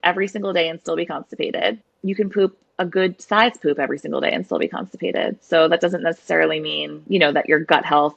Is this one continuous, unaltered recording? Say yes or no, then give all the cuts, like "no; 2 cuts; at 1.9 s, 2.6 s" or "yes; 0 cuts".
no; 1 cut; at 1.9 s